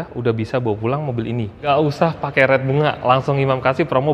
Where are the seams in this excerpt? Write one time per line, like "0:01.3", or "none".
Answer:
0:01.7